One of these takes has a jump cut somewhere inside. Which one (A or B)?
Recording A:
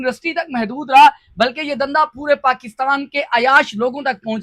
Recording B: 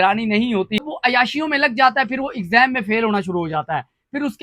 B